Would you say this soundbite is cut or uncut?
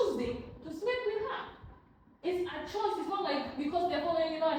uncut